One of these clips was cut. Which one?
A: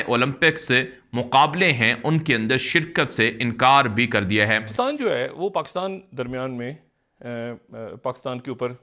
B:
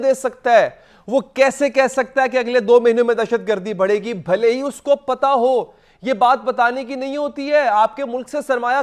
A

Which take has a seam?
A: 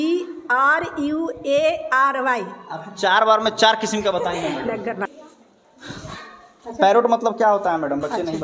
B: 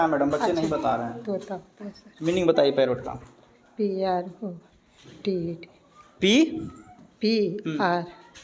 A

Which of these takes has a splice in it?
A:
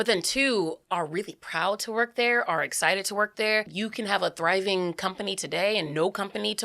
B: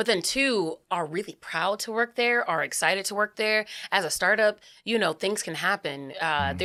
A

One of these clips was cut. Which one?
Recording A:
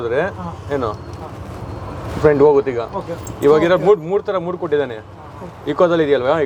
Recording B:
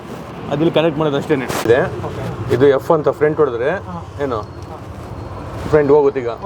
B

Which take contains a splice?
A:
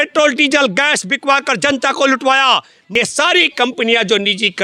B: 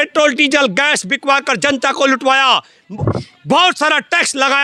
A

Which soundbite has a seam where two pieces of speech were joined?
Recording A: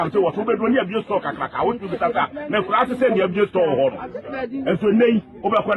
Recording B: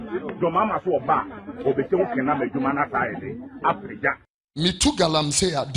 B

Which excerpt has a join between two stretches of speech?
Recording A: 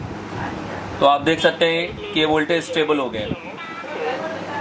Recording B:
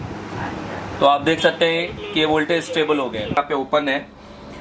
B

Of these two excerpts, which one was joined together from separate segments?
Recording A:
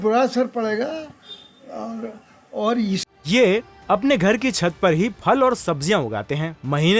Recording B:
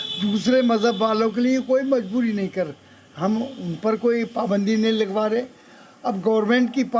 A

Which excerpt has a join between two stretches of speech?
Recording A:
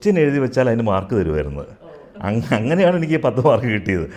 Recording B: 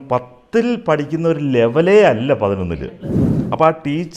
B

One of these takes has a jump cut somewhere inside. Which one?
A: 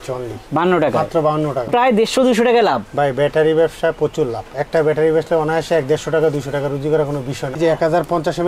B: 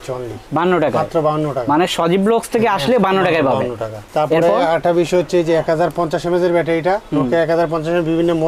A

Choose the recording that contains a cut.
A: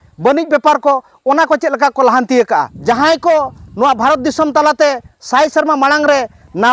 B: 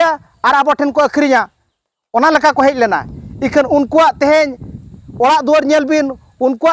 A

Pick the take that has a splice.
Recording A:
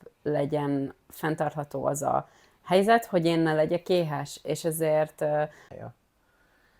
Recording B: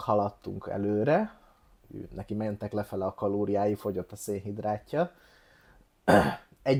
A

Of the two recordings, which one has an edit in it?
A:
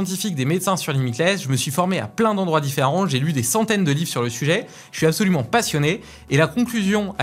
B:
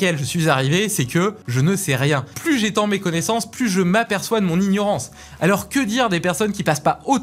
B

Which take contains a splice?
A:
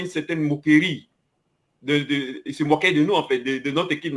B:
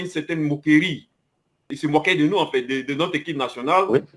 B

